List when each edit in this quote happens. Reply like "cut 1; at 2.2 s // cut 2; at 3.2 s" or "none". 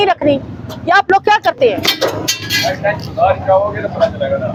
none